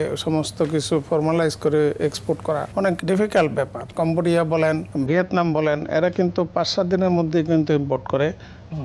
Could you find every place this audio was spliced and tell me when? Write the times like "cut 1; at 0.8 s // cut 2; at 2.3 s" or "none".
cut 1; at 2.9 s // cut 2; at 3.8 s // cut 3; at 4.9 s